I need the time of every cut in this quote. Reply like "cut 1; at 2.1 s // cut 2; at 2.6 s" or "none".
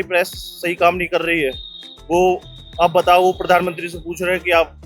none